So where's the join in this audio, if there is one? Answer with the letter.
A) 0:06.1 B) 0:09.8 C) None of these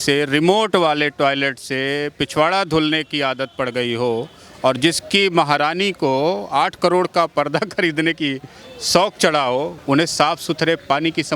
B